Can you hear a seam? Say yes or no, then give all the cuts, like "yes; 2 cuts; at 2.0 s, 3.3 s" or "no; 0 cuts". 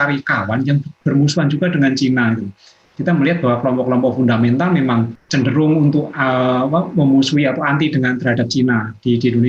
yes; 1 cut; at 5.2 s